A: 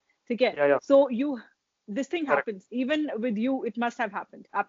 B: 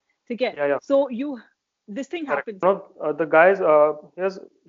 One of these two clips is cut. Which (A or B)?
B